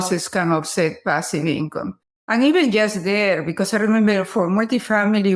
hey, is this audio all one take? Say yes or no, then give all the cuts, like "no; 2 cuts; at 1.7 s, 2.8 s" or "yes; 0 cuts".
yes; 0 cuts